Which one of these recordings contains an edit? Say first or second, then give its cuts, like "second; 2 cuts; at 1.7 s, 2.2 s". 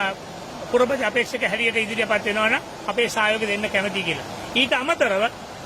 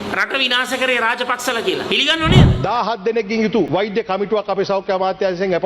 second; 2 cuts; at 2.5 s, 3.7 s